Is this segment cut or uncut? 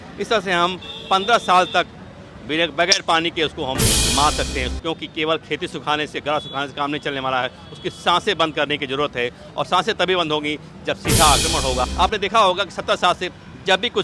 cut